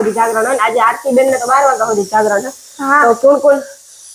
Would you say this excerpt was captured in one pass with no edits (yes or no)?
yes